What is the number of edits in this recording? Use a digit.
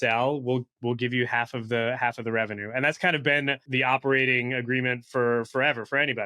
1